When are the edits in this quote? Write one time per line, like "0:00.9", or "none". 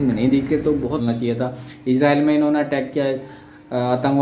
0:01.0